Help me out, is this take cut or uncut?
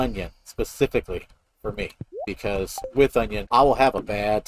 cut